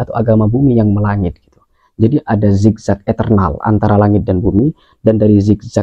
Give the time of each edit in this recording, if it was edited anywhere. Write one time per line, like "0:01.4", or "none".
none